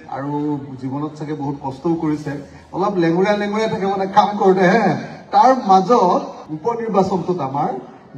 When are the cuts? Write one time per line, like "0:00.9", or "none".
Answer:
0:06.4